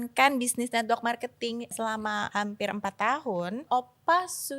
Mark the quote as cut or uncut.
cut